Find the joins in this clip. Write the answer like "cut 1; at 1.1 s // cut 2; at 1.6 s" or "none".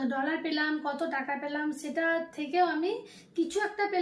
none